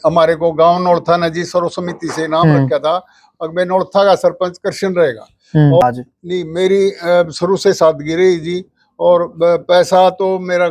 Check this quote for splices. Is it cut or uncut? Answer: cut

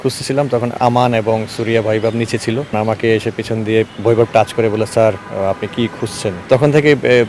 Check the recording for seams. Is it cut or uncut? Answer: cut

